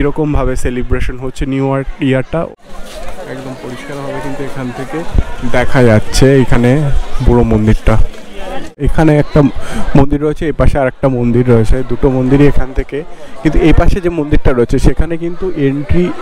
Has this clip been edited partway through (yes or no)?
yes